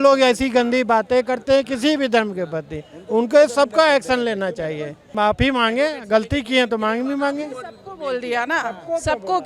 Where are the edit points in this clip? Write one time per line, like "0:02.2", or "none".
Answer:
none